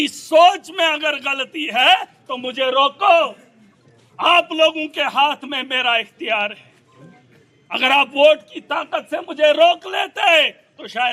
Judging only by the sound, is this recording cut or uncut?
uncut